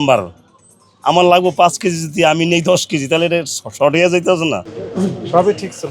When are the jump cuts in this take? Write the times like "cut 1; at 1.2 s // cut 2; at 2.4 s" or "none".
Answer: cut 1; at 4.8 s